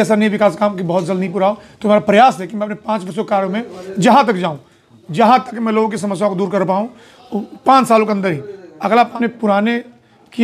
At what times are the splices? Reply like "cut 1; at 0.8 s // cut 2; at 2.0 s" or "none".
cut 1; at 9.1 s